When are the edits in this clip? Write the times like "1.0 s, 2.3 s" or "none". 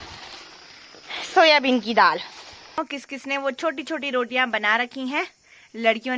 2.8 s

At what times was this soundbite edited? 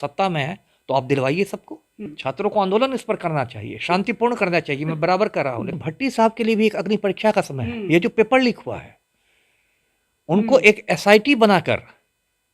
2.1 s, 5.7 s

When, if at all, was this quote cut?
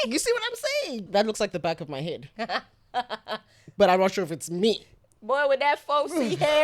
1.1 s

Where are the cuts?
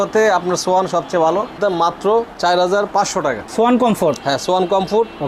1.6 s, 3.4 s

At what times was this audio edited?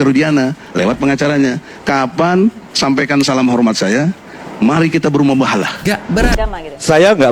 6.3 s

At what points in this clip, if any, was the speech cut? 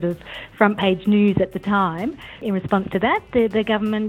2.4 s

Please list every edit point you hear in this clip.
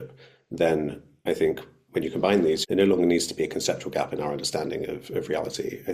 1.7 s, 2.6 s

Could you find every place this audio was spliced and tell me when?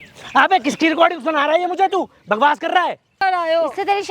3.2 s

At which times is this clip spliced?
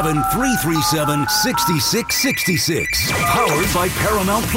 none

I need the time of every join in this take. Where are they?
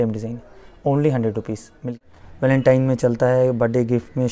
2.1 s

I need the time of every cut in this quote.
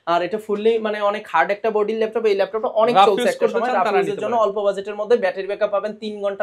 none

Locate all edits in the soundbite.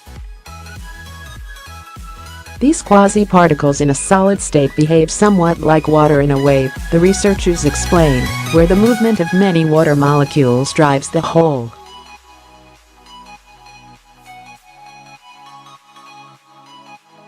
2.6 s, 12.3 s

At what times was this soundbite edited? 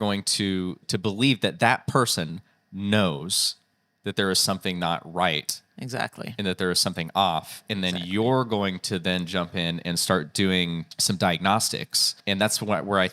0.9 s, 10.9 s, 12.1 s

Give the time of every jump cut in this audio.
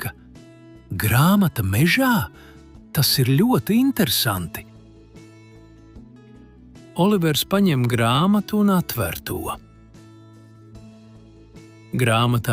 none

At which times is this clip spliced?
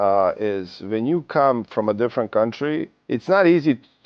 2.9 s

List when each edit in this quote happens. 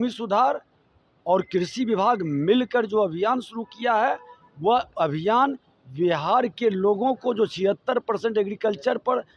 none

